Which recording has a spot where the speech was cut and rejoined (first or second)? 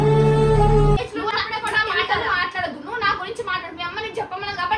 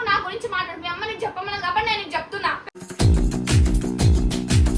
first